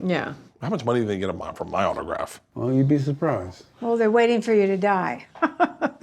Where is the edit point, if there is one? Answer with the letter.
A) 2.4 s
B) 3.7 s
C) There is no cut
A